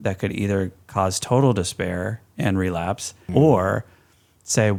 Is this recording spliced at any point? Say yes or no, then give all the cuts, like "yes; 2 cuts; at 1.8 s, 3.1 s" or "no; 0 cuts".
no; 0 cuts